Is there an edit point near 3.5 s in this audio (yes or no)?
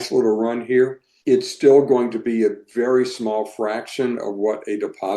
no